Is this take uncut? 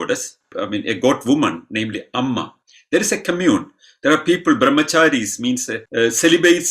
no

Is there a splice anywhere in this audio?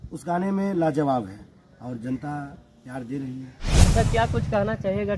yes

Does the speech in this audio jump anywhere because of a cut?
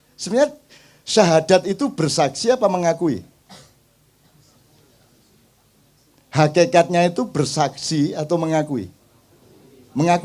no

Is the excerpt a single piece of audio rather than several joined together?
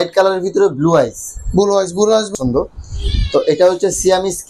no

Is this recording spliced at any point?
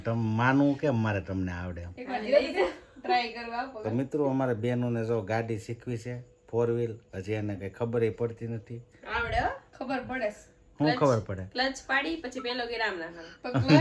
no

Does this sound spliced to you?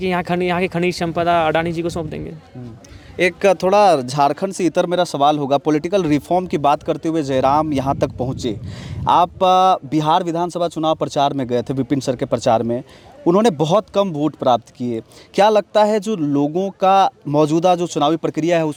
no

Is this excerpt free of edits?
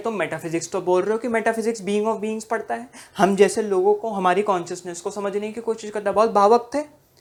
yes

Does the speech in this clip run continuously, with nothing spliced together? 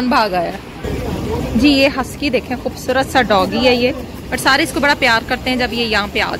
yes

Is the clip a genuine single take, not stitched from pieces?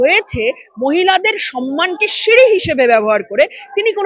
yes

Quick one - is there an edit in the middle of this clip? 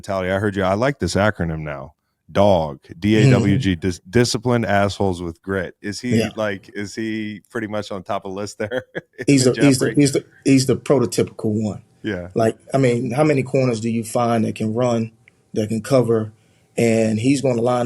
no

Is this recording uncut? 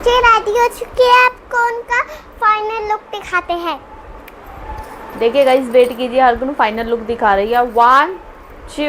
yes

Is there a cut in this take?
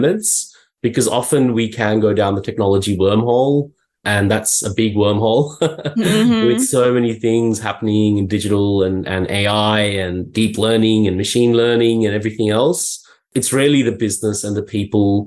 no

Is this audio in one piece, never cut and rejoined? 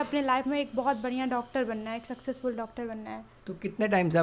yes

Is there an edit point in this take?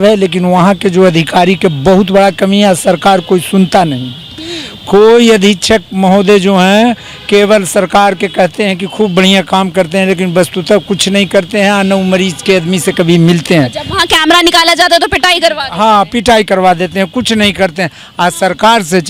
no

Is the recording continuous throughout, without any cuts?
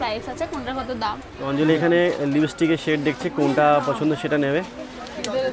no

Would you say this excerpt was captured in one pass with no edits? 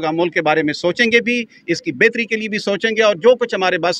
yes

